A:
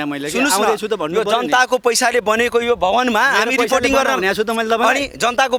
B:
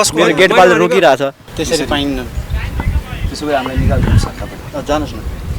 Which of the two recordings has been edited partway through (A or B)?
B